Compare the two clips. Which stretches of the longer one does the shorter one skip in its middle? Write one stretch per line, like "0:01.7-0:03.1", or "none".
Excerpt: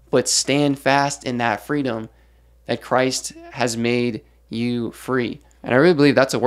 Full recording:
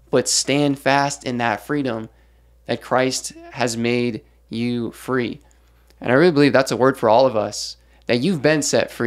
0:05.5-0:05.9